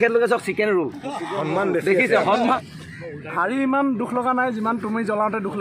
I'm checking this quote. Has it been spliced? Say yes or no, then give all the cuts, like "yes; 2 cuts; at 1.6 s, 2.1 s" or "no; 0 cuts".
yes; 1 cut; at 2.6 s